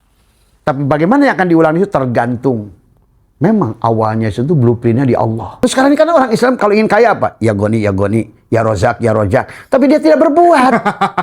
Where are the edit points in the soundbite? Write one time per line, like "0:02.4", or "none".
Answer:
0:05.6